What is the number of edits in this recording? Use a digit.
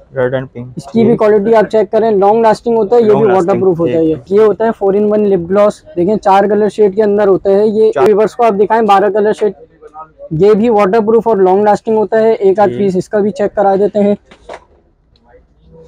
2